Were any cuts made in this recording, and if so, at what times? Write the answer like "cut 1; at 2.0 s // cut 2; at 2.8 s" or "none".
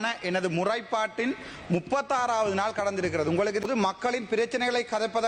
cut 1; at 3.7 s